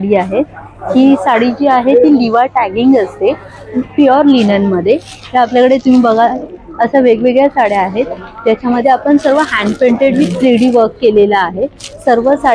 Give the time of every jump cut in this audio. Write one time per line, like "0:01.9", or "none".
none